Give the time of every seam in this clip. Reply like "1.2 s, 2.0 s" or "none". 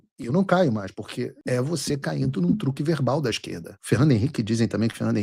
3.7 s